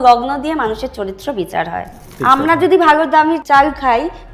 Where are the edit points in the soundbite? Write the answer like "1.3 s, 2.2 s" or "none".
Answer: 2.1 s, 3.4 s